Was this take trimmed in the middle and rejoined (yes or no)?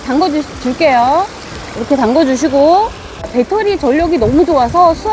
yes